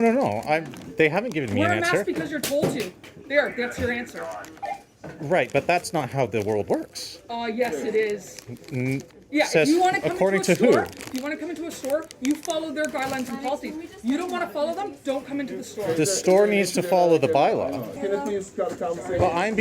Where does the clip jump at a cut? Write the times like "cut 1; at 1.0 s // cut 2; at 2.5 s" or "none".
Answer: cut 1; at 18.0 s